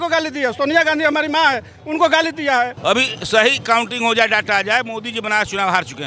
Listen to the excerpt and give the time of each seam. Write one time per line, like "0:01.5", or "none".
0:02.8